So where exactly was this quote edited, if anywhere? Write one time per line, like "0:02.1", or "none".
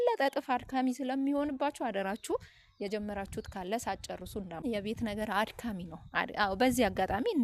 0:04.6